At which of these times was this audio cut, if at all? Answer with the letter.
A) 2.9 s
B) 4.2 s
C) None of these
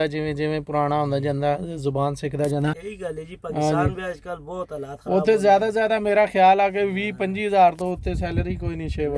A